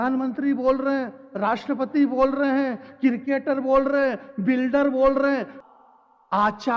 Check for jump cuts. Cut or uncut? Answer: cut